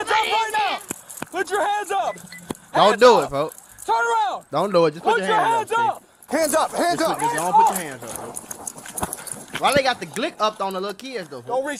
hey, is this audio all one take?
yes; 0 cuts

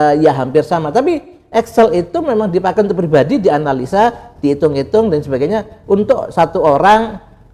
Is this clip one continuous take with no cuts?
yes; 0 cuts

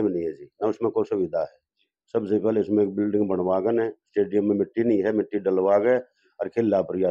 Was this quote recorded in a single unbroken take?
yes; 0 cuts

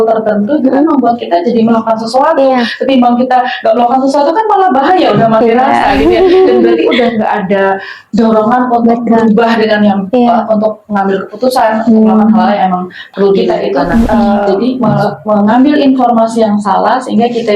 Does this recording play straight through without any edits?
no; 1 cut; at 14.9 s

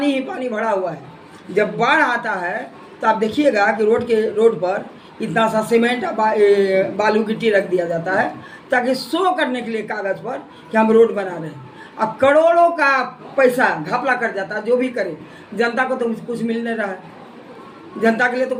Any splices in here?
no; 0 cuts

